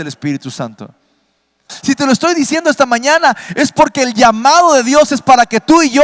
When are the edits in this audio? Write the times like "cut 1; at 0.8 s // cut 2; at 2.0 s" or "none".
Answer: cut 1; at 1.7 s